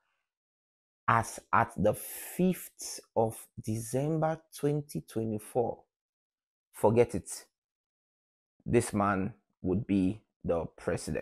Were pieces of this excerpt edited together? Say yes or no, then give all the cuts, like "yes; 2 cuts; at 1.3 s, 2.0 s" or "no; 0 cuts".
no; 0 cuts